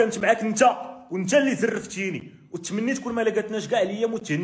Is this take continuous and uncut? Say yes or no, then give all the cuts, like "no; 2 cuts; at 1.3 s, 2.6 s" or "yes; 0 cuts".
yes; 0 cuts